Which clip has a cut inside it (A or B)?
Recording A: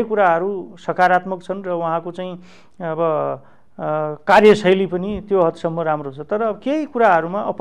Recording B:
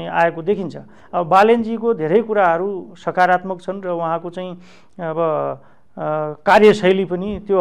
B